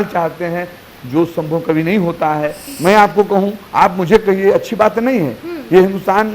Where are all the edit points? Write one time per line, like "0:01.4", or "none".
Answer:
0:02.6